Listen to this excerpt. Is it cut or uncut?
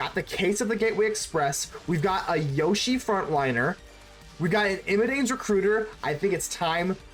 uncut